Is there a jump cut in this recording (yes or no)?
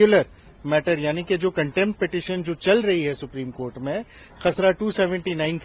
no